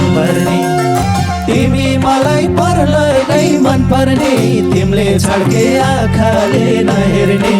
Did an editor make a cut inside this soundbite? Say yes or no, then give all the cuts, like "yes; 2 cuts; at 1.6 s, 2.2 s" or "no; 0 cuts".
no; 0 cuts